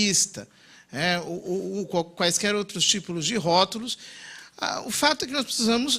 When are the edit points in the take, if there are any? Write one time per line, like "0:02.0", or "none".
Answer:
none